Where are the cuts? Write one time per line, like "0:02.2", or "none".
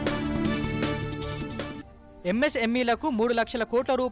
0:01.9